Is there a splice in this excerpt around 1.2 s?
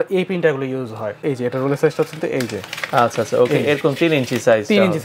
yes; 1 cut; at 1.2 s

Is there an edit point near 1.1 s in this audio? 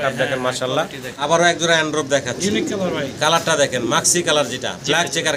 yes; 1 cut; at 1.1 s

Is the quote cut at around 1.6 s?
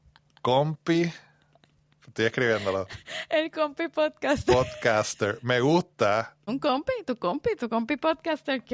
no; 1 cut; at 6.4 s

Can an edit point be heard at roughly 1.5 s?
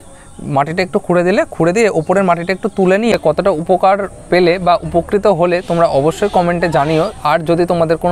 no; 1 cut; at 3.1 s

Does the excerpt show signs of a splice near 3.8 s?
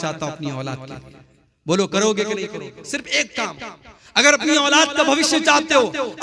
no; 0 cuts

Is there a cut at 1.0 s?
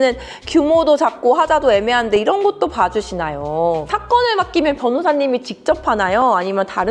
no; 1 cut; at 3.9 s

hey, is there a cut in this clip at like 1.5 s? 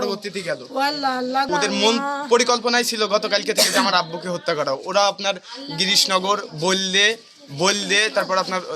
yes; 1 cut; at 1.5 s

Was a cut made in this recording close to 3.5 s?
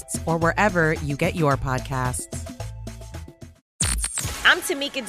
yes; 1 cut; at 3.5 s

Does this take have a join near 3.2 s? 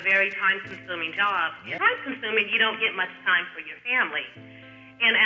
no; 1 cut; at 1.7 s

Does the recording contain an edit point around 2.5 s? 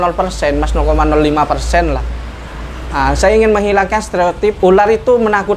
no; 1 cut; at 4.6 s

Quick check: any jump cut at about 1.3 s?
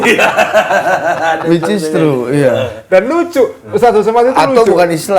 no; 0 cuts

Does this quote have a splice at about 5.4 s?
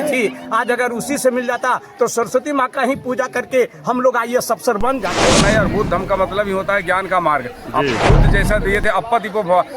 yes; 1 cut; at 5.4 s

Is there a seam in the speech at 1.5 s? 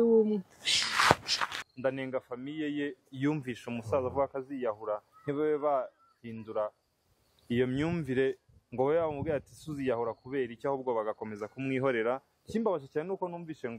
yes; 1 cut; at 1.5 s

